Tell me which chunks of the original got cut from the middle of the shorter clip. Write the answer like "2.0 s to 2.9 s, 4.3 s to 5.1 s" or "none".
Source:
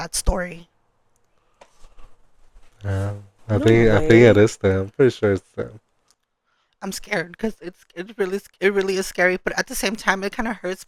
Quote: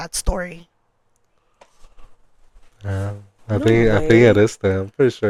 none